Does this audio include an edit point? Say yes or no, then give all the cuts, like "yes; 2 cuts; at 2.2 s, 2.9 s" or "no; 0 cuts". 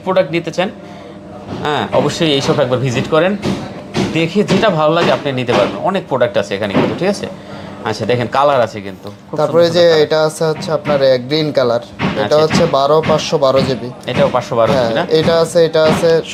no; 0 cuts